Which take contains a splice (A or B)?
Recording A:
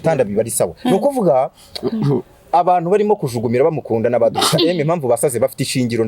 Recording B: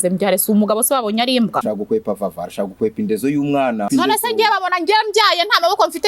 B